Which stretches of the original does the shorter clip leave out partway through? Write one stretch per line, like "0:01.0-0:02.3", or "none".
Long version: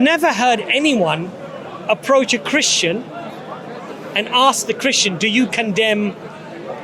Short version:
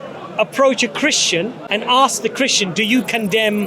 0:03.1-0:04.0